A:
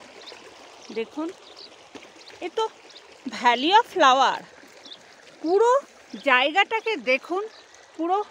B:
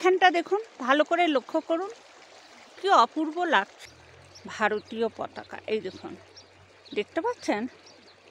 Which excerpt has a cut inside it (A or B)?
B